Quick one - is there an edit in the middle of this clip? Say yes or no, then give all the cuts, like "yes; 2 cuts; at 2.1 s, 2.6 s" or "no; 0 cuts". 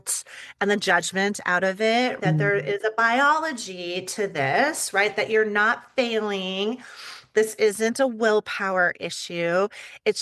yes; 1 cut; at 2.2 s